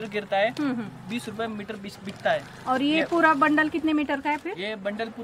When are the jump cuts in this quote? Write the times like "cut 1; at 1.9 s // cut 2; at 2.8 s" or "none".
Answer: none